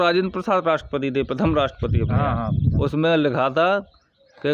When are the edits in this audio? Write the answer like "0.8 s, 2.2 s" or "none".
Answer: 2.8 s